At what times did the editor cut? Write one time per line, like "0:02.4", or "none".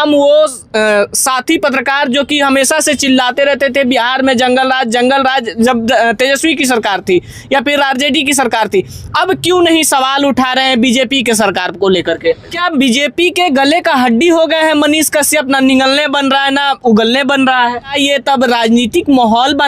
0:12.6
0:17.9

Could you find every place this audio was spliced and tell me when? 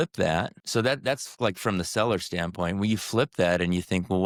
none

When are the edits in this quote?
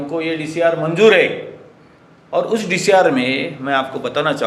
none

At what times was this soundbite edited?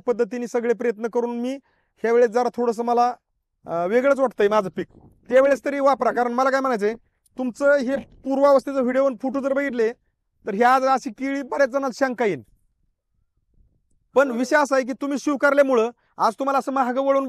none

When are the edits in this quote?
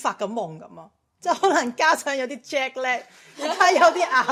none

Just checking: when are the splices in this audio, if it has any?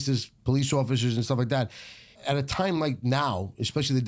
0:02.0

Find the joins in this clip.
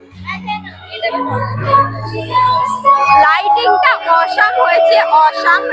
0:03.0

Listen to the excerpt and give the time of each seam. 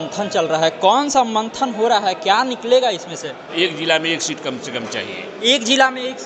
0:03.5

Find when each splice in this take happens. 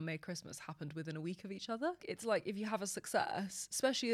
0:02.1

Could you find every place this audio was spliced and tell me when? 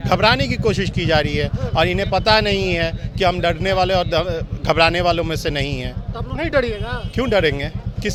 none

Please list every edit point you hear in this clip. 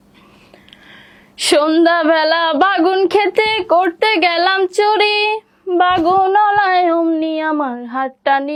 none

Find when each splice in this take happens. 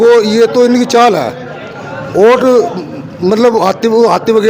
none

